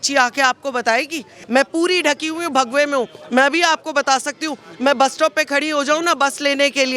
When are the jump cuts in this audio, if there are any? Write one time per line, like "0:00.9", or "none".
0:01.3